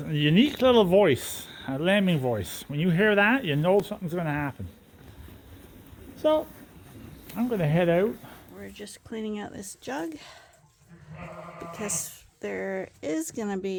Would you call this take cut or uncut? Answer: uncut